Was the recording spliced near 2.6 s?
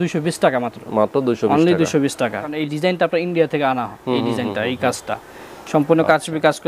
yes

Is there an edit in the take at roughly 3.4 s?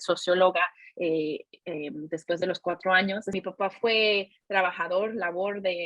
yes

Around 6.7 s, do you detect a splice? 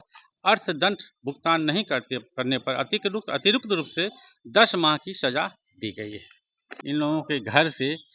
yes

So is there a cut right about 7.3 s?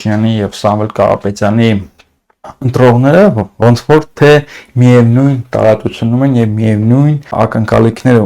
yes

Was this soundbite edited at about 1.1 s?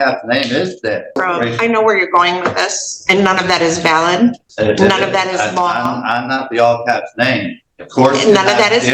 yes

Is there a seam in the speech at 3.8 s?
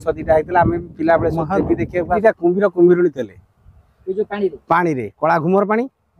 no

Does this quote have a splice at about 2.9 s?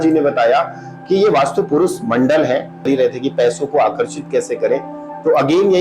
yes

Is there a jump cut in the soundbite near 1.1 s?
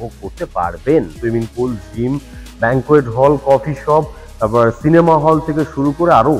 yes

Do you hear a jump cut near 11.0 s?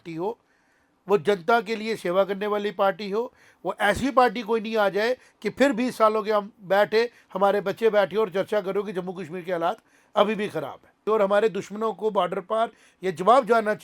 yes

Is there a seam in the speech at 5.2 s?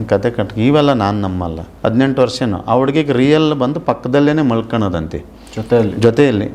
no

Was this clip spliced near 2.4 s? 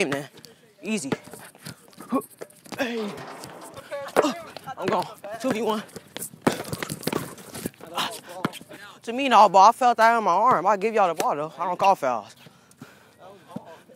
no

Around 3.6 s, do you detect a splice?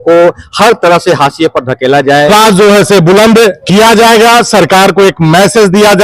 yes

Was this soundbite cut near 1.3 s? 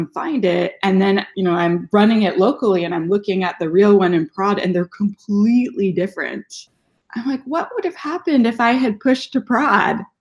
yes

